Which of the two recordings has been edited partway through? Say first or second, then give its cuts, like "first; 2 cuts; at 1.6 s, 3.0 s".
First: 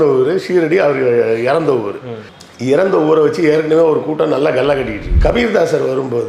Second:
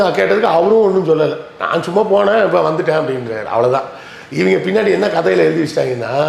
first; 1 cut; at 5.1 s